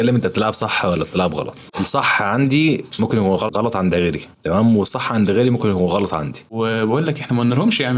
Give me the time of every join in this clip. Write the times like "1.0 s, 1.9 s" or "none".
1.7 s, 3.5 s, 6.4 s